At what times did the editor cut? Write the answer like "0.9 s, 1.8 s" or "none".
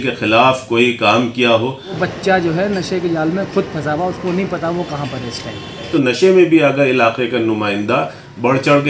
2.1 s, 5.9 s